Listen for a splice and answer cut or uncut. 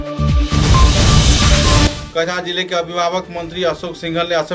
cut